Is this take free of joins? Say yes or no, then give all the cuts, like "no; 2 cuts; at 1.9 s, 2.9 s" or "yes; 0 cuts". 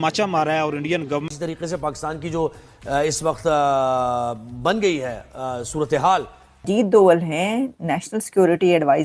no; 2 cuts; at 1.2 s, 6.7 s